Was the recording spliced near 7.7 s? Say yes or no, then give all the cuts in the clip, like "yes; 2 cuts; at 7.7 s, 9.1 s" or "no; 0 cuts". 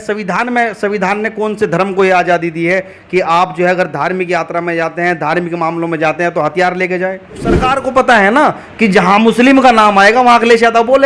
yes; 1 cut; at 7.7 s